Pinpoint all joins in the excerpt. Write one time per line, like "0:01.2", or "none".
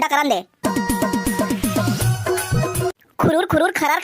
0:02.8